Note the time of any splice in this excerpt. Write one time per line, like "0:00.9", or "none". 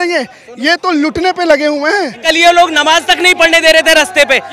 0:02.2